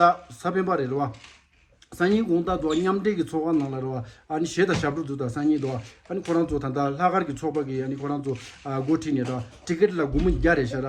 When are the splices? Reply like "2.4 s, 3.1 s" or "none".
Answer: none

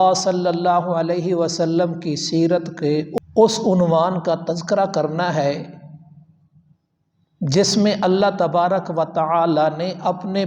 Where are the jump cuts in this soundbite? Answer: 3.2 s

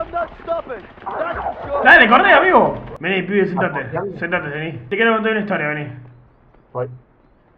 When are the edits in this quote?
2.9 s, 4.8 s

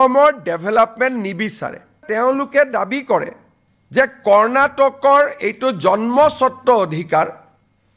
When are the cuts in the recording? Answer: 2.1 s

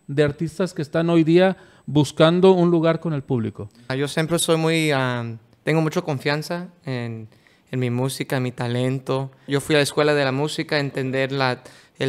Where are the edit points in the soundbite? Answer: none

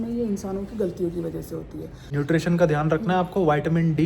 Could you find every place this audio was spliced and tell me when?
2.0 s

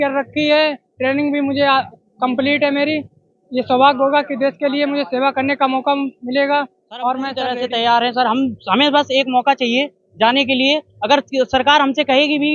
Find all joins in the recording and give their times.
2.0 s, 7.4 s

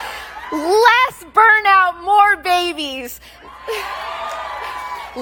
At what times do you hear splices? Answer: none

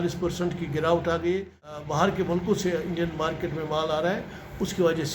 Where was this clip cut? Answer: 1.8 s

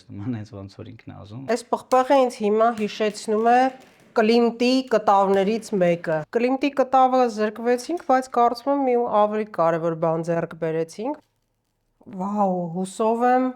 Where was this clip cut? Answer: 1.4 s, 6.2 s, 11.2 s

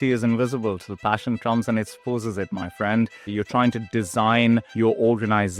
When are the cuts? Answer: 3.3 s, 4.7 s

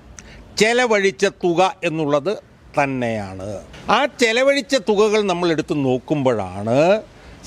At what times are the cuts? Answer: 3.7 s

